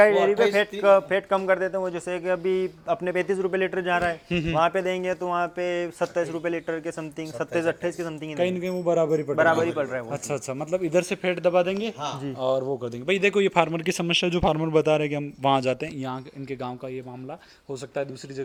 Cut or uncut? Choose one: uncut